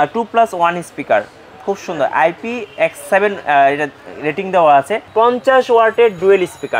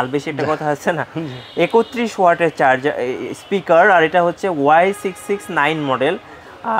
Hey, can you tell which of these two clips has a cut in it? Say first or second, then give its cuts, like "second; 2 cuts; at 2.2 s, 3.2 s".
first; 1 cut; at 5.0 s